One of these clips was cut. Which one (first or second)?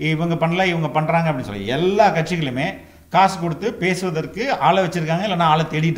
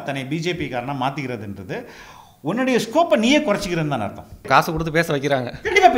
second